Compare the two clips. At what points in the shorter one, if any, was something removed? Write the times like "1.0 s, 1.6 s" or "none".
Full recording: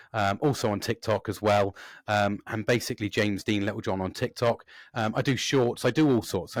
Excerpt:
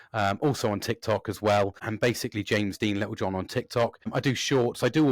1.8 s, 4.1 s